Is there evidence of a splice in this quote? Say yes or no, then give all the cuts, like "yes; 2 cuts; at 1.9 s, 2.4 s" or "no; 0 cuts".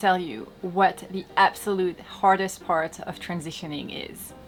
no; 0 cuts